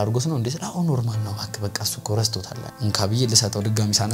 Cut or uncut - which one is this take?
cut